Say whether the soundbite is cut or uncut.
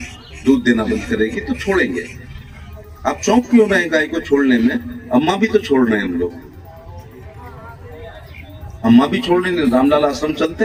uncut